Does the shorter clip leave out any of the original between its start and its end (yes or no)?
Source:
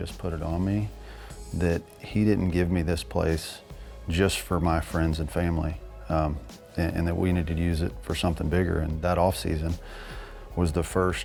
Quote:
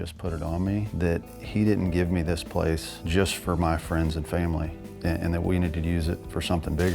yes